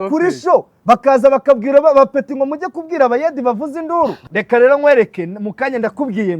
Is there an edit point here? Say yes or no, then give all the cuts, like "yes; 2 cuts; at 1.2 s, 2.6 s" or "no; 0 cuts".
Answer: yes; 1 cut; at 4.2 s